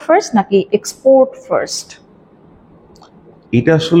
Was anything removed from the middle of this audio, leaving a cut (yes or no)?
no